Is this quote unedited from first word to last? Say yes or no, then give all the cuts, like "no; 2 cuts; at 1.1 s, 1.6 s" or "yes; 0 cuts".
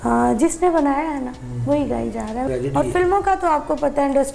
no; 1 cut; at 2.4 s